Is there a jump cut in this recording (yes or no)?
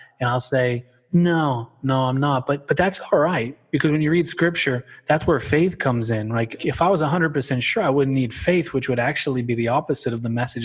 yes